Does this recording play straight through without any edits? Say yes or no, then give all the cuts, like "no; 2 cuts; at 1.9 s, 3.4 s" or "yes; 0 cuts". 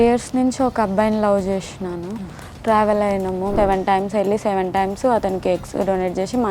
no; 1 cut; at 3.5 s